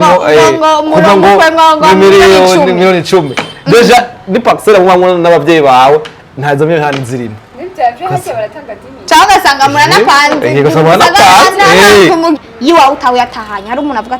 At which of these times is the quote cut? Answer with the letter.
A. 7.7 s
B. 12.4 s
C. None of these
B